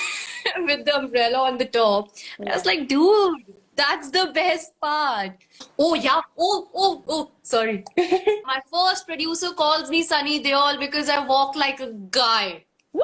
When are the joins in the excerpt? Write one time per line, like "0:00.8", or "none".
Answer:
0:05.7
0:08.5